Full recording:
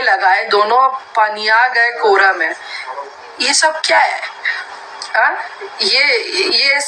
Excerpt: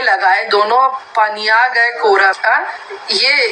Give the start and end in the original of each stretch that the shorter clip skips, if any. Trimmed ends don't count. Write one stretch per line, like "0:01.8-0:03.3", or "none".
0:02.4-0:05.1